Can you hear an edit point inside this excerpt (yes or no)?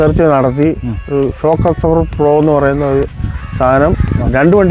no